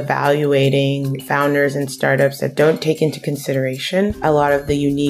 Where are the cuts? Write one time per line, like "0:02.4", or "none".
0:01.2
0:04.2